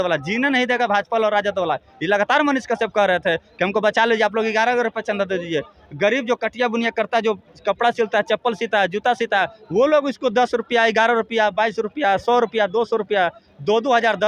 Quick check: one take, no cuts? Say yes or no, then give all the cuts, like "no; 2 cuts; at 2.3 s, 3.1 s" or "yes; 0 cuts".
yes; 0 cuts